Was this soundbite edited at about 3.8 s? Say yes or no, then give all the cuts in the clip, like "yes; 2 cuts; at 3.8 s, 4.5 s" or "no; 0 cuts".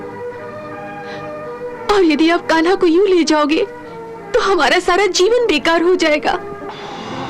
no; 0 cuts